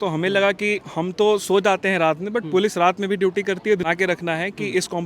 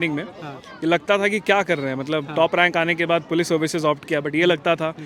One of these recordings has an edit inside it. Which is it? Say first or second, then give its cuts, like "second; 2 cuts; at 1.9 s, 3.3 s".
first; 1 cut; at 3.9 s